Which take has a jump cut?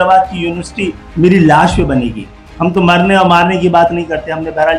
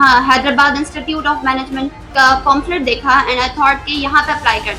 second; 1 cut; at 2.1 s

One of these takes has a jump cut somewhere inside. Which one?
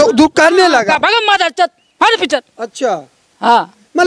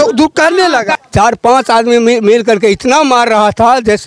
second; 1 cut; at 1.0 s

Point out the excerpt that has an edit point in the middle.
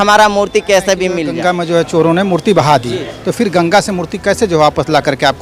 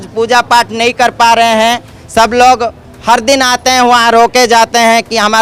first; 1 cut; at 1.3 s

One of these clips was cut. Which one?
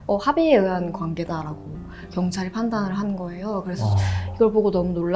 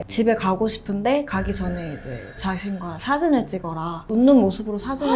second; 1 cut; at 4.0 s

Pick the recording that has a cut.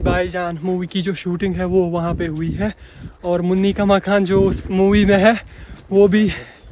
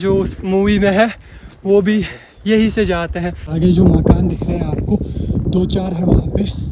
second; 1 cut; at 3.4 s

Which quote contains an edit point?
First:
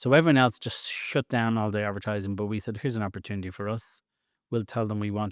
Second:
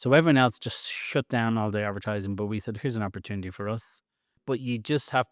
second; 1 cut; at 4.3 s

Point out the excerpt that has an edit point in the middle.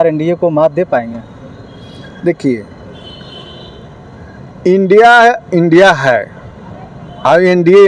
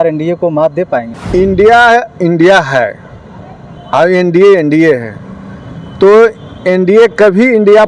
second; 1 cut; at 1.2 s

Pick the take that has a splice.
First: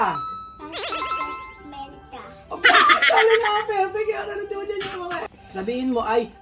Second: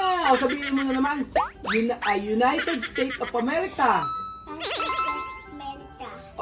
first; 1 cut; at 5.2 s

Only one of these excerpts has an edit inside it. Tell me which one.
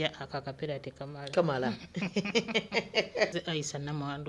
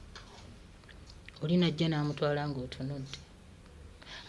first; 1 cut; at 3.3 s

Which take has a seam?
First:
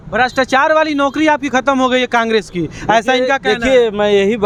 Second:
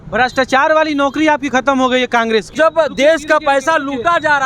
second; 1 cut; at 2.5 s

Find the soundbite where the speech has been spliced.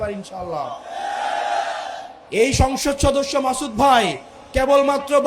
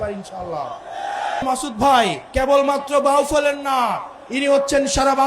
second; 2 cuts; at 1.4 s, 2.2 s

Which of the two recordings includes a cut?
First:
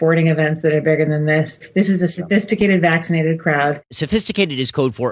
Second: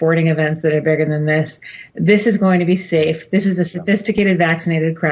first; 2 cuts; at 1.6 s, 4.0 s

